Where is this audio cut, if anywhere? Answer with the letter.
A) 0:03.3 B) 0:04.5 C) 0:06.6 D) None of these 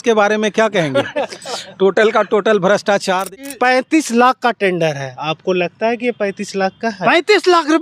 A